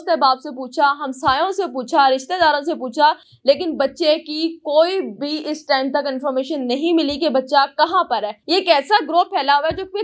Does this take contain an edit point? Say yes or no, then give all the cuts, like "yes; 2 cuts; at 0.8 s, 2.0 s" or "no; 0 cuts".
yes; 1 cut; at 8.3 s